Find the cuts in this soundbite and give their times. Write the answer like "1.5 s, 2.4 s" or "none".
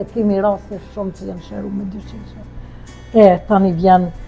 none